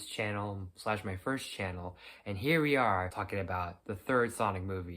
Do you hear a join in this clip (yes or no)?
yes